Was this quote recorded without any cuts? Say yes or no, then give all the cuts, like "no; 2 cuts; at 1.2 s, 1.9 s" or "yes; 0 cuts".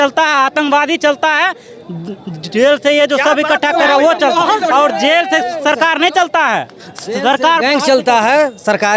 yes; 0 cuts